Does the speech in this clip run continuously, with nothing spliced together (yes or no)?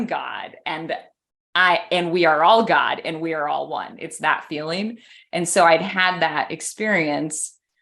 yes